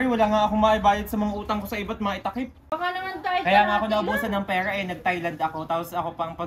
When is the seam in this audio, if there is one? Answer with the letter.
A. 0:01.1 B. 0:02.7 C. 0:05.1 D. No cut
B